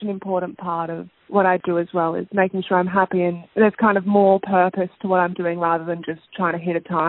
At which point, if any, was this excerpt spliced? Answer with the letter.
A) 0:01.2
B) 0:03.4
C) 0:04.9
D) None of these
B